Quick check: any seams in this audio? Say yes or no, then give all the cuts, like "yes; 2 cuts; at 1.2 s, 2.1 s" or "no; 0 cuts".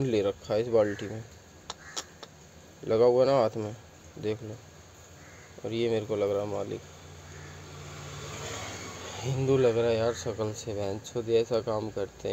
no; 0 cuts